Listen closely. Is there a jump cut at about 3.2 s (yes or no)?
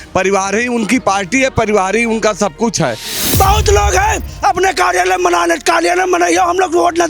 yes